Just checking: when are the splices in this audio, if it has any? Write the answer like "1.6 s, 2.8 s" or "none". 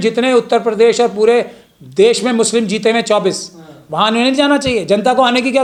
none

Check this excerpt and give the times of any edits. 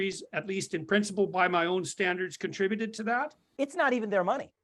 3.4 s

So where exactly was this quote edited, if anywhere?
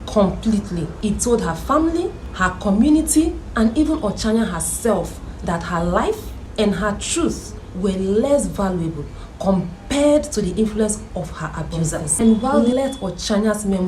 0.9 s, 2.2 s, 6.4 s, 12.6 s

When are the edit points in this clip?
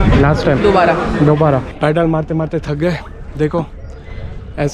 1.7 s

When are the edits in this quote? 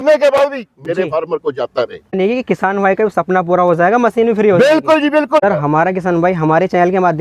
2.2 s, 5.4 s

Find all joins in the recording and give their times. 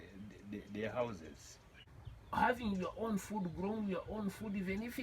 1.6 s

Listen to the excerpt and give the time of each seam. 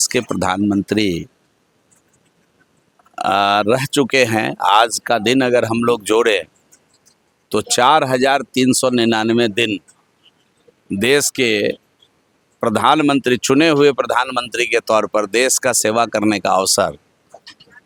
none

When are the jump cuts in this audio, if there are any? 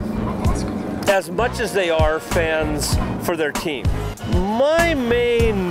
3.9 s

